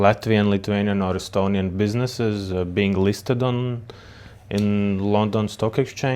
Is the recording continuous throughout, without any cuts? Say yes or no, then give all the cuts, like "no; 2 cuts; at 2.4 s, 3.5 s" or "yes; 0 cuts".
yes; 0 cuts